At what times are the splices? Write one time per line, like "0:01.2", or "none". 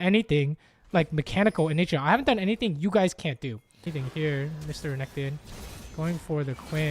0:03.9